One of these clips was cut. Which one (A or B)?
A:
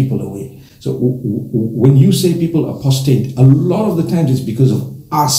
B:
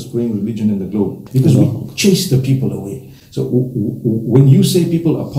B